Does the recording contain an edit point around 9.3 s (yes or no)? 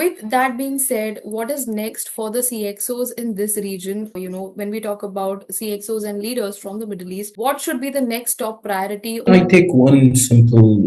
yes